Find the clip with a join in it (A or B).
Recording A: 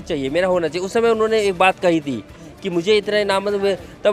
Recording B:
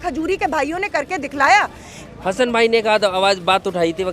B